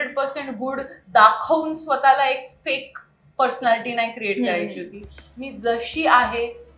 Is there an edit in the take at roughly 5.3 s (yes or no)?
no